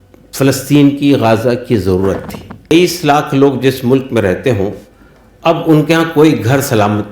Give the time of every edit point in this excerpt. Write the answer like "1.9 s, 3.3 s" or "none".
2.7 s